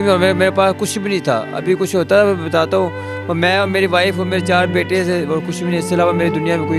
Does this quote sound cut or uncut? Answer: uncut